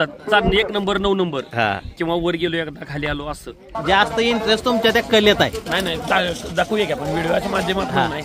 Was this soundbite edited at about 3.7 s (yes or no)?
yes